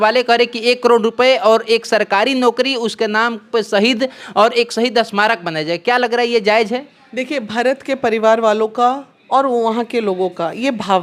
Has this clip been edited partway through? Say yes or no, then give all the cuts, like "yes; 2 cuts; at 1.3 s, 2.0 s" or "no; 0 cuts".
no; 0 cuts